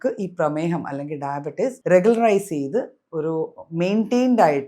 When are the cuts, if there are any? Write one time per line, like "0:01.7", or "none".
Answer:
0:01.8